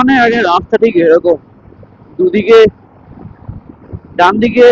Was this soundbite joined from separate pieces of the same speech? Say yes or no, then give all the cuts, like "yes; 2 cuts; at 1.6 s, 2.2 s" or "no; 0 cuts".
no; 0 cuts